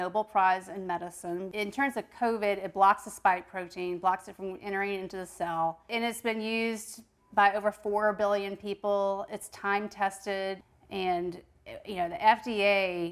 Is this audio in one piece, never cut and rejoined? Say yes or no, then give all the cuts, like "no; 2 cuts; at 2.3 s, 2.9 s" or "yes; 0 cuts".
no; 3 cuts; at 1.5 s, 5.9 s, 10.7 s